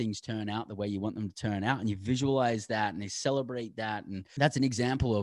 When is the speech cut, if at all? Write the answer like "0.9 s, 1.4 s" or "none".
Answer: 4.2 s